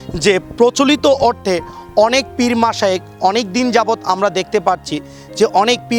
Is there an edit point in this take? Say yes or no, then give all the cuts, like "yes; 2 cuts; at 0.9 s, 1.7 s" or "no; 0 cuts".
no; 0 cuts